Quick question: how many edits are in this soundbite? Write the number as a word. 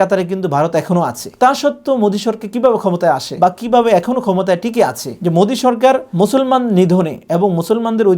two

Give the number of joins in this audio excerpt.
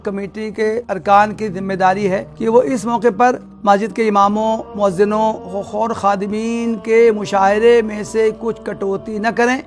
five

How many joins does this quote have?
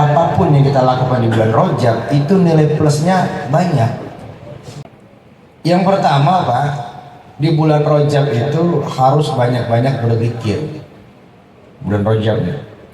one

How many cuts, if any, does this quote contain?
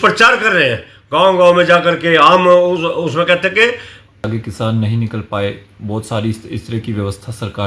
one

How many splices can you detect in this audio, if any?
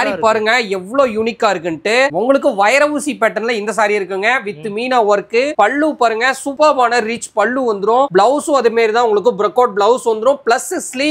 zero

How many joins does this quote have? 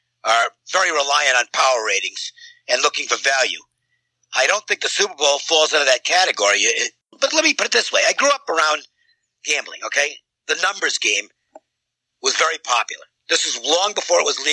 one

